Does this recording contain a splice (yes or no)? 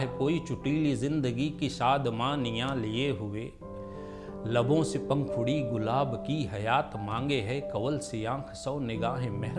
no